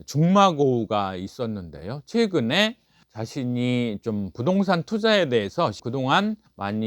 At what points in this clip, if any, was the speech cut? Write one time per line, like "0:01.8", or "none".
0:05.8

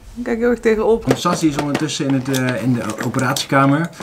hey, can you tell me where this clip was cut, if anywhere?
0:01.0

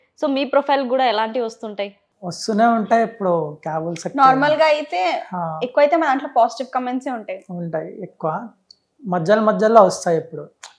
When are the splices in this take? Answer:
none

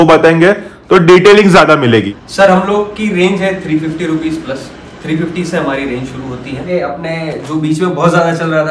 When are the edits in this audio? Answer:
0:02.1
0:06.7

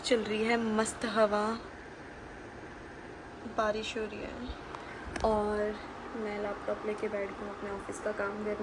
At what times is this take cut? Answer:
none

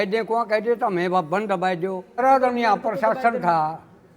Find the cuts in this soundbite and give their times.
0:02.2

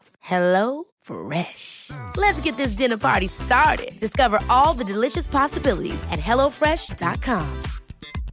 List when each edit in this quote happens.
none

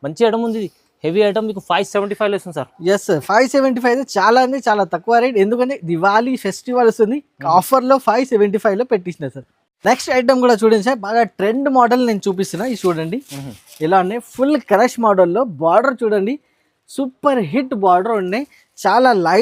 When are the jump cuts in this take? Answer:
none

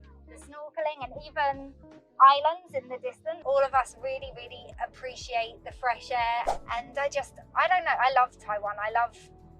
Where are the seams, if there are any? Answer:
0:03.3

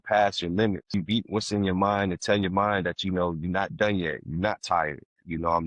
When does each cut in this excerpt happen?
0:00.9

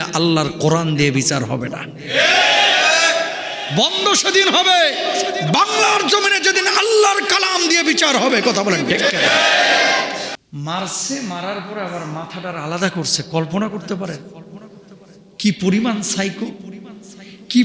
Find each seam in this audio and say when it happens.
0:10.3

